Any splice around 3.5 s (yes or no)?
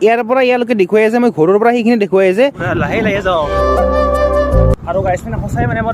yes